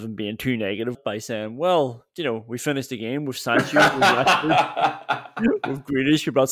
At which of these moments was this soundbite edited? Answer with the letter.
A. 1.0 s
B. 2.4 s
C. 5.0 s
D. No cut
A